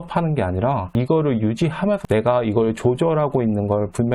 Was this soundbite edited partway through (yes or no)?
yes